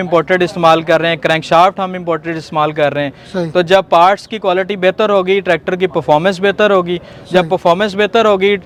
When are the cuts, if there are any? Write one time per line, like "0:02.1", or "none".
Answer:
none